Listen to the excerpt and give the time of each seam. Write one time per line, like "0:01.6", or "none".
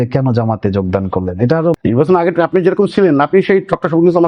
0:01.8